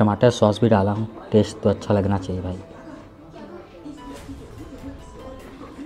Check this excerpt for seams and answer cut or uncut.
uncut